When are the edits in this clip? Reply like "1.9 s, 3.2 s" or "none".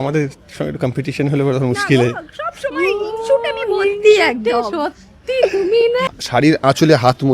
6.1 s